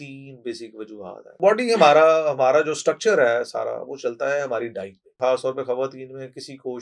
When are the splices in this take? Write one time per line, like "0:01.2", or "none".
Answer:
0:01.4
0:05.0